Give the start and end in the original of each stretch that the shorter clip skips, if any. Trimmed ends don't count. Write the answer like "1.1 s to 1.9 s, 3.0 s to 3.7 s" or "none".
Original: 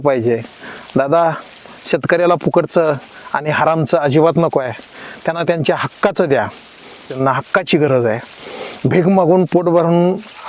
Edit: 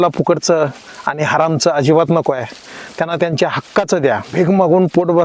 6.6 s to 8.9 s